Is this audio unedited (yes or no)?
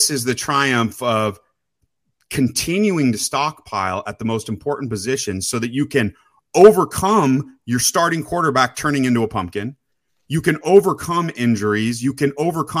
yes